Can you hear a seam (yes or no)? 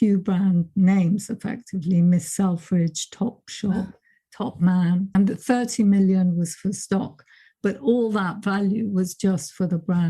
yes